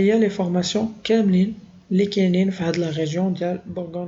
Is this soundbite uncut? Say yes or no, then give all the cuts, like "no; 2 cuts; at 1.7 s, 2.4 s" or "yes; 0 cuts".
yes; 0 cuts